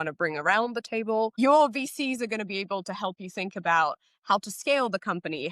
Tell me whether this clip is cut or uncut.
cut